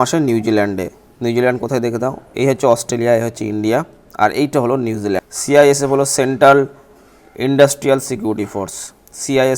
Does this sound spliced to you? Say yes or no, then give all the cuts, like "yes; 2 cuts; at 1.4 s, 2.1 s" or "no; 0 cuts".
yes; 1 cut; at 5.3 s